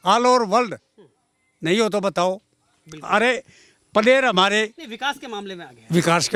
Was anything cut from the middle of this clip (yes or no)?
no